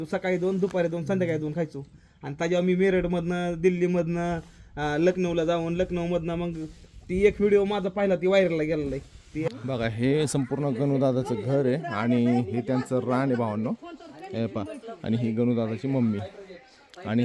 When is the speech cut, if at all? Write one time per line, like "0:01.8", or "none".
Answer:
0:09.5